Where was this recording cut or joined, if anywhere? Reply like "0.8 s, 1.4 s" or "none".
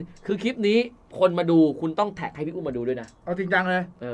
3.2 s